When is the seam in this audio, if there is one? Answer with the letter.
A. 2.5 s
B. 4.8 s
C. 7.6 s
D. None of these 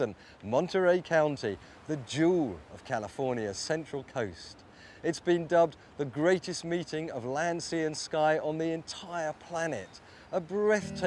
A